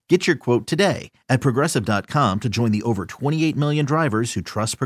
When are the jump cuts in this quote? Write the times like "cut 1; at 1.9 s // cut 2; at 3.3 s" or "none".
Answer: none